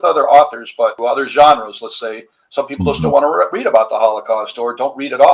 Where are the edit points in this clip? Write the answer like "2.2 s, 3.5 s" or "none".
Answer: 1.0 s